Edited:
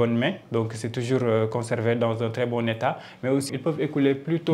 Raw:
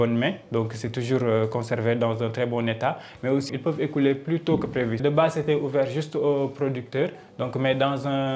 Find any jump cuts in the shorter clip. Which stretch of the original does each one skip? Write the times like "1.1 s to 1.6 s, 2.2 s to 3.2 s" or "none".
none